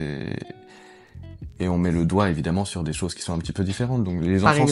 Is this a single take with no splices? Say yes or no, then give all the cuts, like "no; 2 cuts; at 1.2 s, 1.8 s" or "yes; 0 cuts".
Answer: yes; 0 cuts